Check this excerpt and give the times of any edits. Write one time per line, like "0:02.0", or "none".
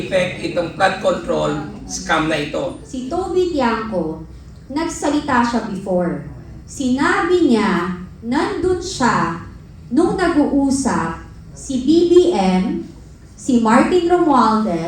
0:02.9